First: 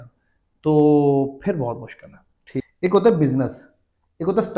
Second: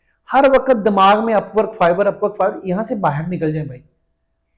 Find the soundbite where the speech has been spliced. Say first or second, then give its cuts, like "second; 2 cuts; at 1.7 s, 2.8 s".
first; 1 cut; at 2.4 s